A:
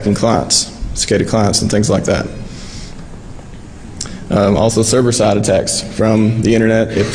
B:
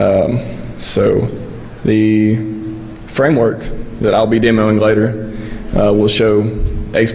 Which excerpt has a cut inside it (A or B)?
A